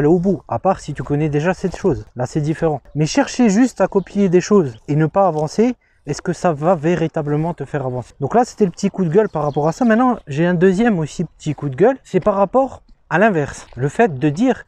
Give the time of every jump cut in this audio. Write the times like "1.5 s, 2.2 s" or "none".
none